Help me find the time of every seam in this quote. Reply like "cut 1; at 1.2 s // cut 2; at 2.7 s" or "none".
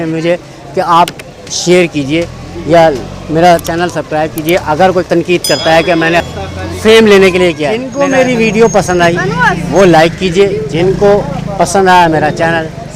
cut 1; at 5.1 s // cut 2; at 6.2 s // cut 3; at 7.9 s